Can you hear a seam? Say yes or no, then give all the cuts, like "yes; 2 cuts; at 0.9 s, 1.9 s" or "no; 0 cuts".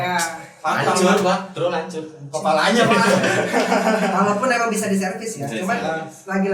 no; 0 cuts